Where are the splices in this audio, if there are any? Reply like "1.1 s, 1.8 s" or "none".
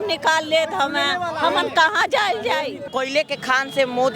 2.8 s